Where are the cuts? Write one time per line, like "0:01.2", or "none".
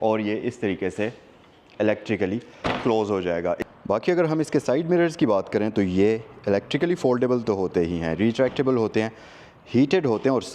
0:03.7